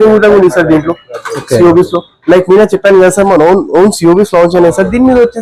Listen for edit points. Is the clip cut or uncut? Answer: uncut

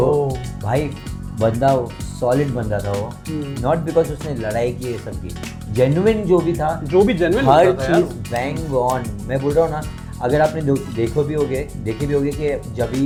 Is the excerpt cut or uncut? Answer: uncut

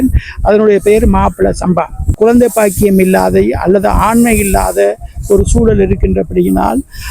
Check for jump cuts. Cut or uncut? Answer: cut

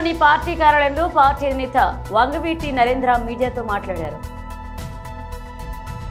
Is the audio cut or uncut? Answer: uncut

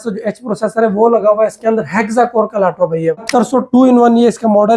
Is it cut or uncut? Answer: cut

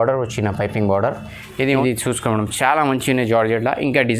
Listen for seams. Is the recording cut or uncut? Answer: cut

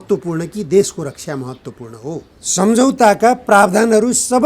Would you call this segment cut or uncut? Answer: cut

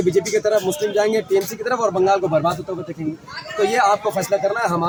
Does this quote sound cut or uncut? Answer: uncut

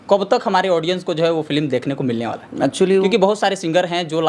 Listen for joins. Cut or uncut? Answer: cut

